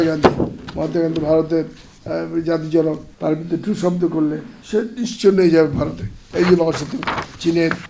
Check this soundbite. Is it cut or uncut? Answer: cut